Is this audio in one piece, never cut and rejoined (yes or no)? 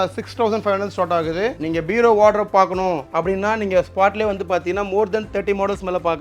no